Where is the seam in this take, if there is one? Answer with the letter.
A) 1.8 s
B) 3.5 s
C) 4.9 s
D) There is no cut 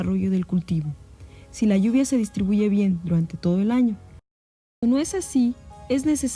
D